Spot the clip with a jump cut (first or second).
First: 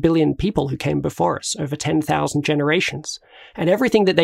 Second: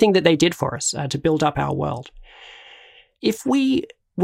second